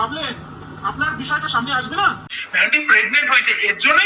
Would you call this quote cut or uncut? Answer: cut